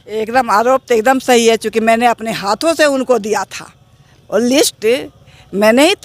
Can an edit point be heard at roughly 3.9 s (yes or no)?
no